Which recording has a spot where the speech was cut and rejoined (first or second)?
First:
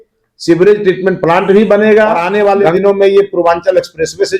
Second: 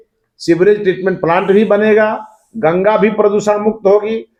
first